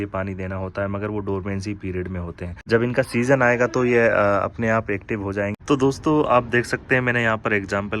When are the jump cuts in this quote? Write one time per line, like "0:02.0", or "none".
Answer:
0:02.5
0:05.6